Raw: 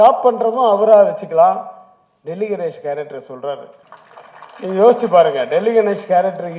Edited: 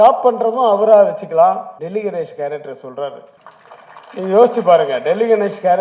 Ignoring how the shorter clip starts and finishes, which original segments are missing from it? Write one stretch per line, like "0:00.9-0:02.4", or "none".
0:01.7-0:02.2